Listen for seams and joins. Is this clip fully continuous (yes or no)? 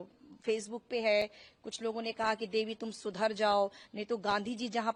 yes